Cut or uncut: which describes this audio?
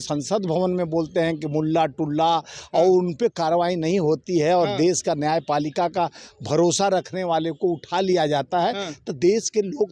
uncut